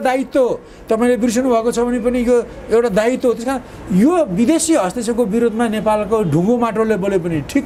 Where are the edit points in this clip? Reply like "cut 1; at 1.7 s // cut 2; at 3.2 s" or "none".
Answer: none